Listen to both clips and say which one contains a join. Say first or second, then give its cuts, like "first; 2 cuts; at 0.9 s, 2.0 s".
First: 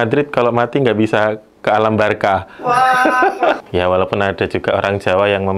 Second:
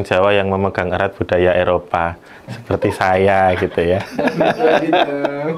first; 1 cut; at 3.6 s